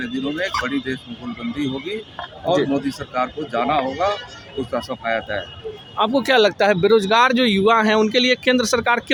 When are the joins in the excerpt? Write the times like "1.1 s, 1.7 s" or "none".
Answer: none